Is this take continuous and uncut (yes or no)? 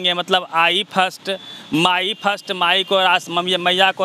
yes